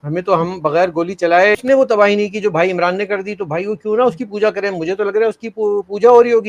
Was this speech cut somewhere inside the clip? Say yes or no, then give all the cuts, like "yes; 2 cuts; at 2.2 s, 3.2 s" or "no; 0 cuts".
yes; 1 cut; at 1.6 s